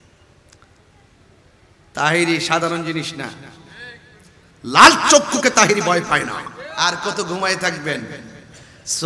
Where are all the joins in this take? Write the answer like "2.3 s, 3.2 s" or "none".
6.6 s